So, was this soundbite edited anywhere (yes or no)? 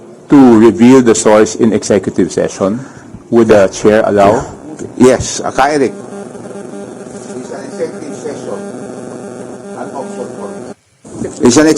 no